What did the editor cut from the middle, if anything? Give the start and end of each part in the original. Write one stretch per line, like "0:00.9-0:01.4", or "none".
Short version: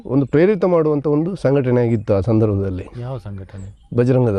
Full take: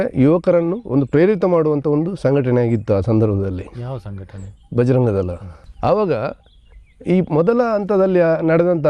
none